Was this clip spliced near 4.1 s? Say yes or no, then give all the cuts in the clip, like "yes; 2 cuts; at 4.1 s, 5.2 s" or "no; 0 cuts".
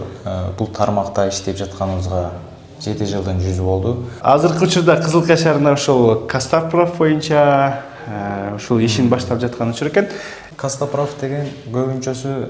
yes; 2 cuts; at 4.1 s, 10.4 s